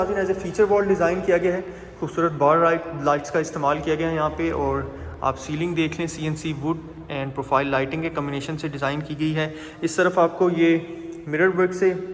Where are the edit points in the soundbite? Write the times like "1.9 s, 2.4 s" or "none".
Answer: none